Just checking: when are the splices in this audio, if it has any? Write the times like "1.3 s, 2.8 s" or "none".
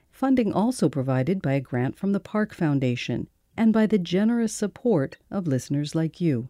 3.4 s